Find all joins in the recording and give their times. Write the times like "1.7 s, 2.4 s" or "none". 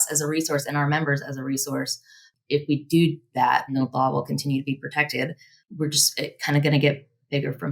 2.3 s, 3.7 s